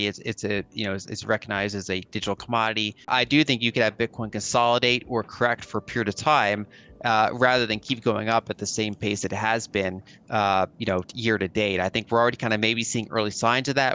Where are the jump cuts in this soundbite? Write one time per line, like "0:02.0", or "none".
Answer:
0:03.1